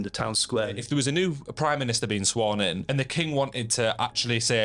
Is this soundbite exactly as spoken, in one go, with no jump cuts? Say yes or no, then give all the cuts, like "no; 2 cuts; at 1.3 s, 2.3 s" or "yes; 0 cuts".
no; 2 cuts; at 0.8 s, 2.8 s